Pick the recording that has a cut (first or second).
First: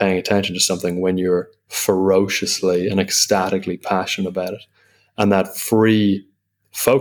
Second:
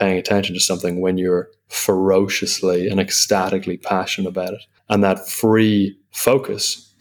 second